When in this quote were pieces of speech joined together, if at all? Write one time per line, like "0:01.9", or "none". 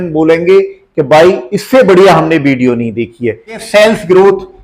0:03.6

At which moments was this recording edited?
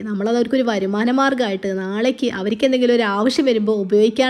none

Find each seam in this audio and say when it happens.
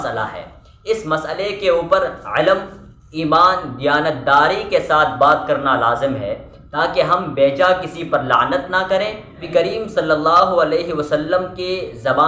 0:09.5

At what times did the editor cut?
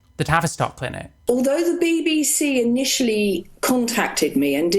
0:01.1

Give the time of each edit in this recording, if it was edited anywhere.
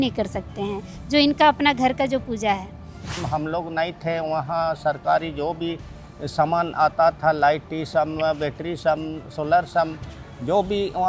0:03.2

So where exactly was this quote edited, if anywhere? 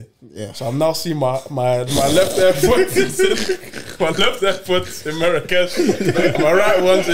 none

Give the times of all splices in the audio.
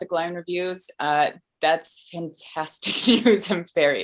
none

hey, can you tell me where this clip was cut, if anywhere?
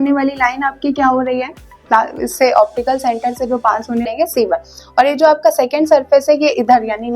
0:04.1

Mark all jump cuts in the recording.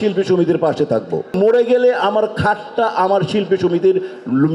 0:01.3

